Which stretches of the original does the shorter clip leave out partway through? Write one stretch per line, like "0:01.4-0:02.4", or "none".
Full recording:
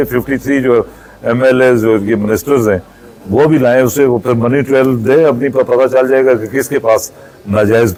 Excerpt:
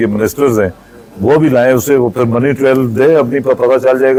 none

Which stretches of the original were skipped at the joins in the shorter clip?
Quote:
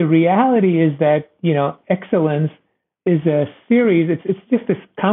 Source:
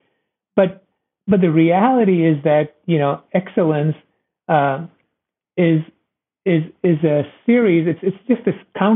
0:04.4-0:06.7

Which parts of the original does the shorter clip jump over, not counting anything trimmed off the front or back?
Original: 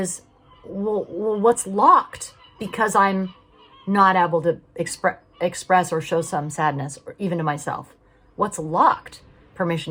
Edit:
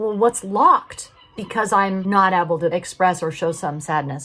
0:03.2-0:03.8
0:04.5-0:05.4

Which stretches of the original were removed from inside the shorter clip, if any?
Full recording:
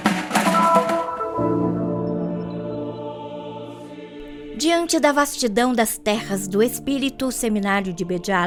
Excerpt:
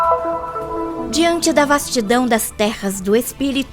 0:01.6-0:04.5

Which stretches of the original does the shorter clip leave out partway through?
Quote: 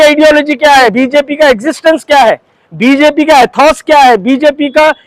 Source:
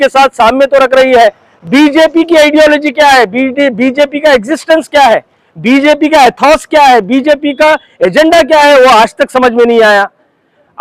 0:03.3-0:03.8

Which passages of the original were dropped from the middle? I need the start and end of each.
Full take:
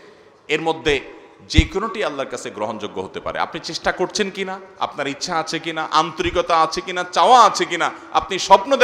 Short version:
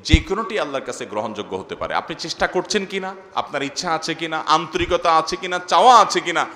none

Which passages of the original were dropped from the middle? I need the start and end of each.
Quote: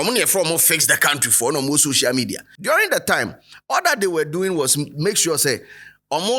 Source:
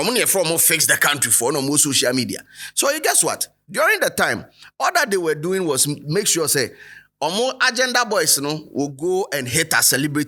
0:02.5-0:03.6

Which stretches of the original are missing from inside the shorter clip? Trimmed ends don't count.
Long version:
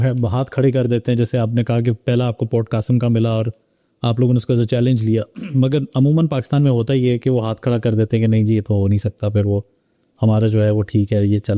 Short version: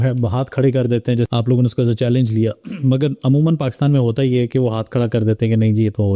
0:01.3-0:04.0

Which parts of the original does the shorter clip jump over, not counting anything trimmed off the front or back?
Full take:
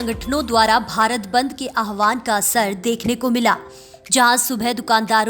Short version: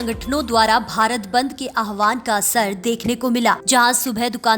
0:03.6-0:04.1

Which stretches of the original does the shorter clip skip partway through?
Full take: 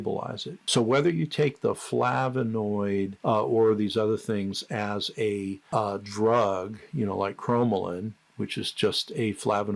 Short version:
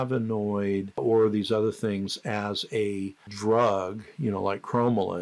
0:03.2-0:03.4
0:05.7-0:06.0

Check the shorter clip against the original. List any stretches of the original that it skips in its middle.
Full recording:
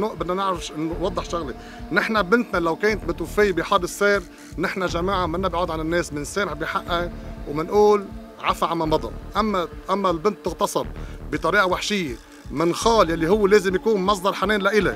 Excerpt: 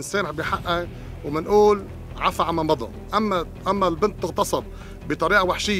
none

